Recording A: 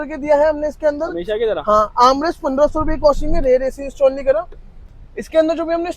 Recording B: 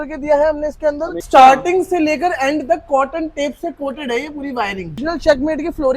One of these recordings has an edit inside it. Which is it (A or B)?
B